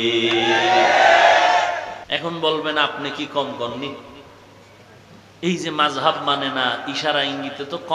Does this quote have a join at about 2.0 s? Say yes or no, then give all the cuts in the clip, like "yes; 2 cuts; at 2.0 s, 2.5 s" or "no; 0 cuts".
yes; 1 cut; at 2.0 s